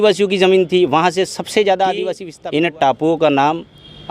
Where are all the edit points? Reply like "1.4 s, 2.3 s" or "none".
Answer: 2.3 s